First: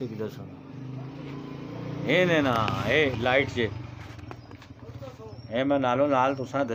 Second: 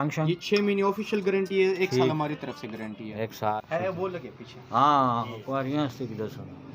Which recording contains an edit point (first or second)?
second